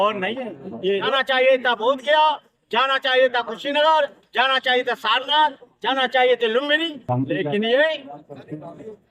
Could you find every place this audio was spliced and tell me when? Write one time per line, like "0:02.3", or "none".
0:01.1